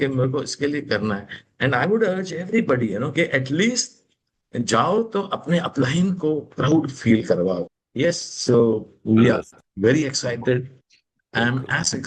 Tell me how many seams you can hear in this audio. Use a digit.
1